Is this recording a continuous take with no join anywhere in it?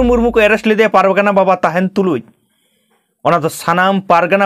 yes; 0 cuts

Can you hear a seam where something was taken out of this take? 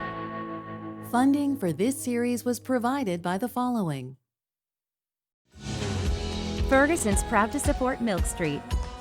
yes; 1 cut; at 0.9 s

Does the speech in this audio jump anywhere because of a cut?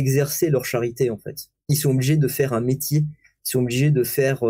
no; 0 cuts

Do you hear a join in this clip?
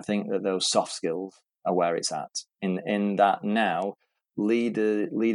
no; 0 cuts

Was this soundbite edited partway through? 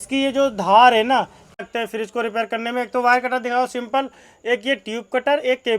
yes; 1 cut; at 1.6 s

